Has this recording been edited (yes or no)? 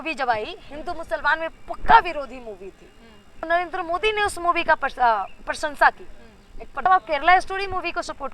yes